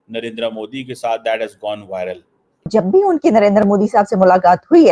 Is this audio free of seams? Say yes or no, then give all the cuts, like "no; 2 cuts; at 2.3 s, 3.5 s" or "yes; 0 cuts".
no; 1 cut; at 2.7 s